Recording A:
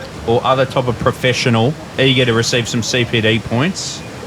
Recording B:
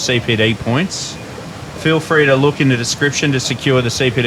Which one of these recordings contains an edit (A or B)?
A